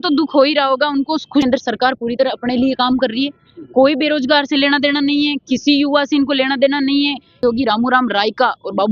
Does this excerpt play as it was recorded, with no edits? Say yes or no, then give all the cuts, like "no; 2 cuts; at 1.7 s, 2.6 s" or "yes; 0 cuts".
no; 2 cuts; at 1.4 s, 7.4 s